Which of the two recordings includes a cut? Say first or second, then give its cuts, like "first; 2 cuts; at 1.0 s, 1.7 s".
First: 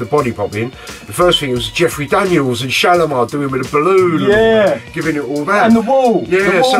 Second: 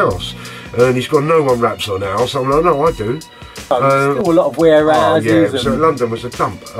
second; 1 cut; at 4.2 s